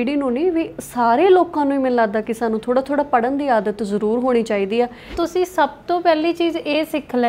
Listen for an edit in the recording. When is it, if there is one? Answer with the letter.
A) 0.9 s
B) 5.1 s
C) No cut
B